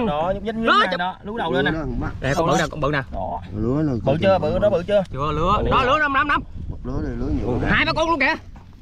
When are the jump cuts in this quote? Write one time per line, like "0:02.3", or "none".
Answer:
none